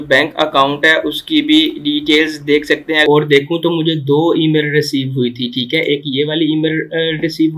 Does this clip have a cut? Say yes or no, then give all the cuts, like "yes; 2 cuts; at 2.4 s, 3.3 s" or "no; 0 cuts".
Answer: yes; 1 cut; at 3.0 s